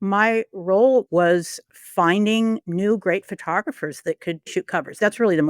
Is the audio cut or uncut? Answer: cut